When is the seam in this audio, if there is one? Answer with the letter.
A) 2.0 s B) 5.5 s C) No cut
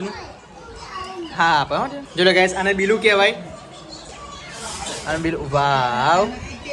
A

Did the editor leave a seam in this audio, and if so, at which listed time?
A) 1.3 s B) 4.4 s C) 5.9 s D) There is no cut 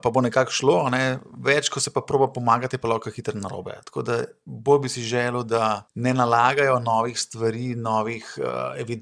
C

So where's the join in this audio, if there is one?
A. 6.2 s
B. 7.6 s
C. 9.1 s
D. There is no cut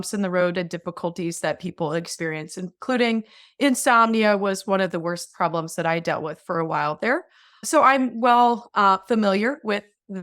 B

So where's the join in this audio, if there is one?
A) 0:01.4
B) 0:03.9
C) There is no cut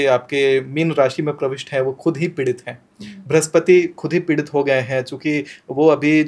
C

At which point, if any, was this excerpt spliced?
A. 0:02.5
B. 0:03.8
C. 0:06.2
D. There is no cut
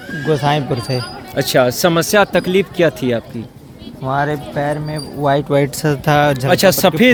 D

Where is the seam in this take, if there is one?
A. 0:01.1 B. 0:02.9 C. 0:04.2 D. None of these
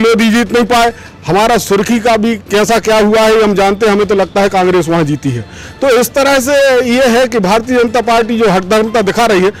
D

